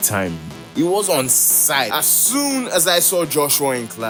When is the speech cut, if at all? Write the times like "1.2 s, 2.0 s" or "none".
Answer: none